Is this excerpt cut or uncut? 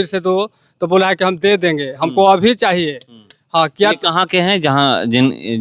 uncut